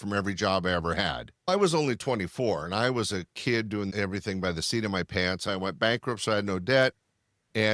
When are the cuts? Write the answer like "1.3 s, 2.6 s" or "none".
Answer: 1.3 s, 5.5 s